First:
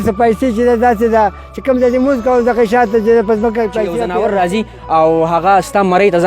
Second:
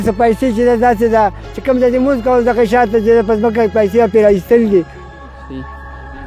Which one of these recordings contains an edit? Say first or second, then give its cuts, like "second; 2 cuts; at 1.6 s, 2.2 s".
first; 1 cut; at 4.0 s